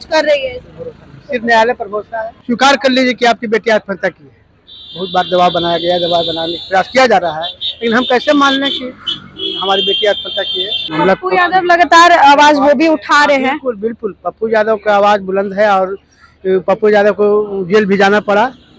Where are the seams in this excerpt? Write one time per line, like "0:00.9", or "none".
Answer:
0:02.3
0:10.8